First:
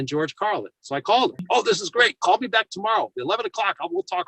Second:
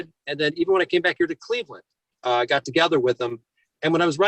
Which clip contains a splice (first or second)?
first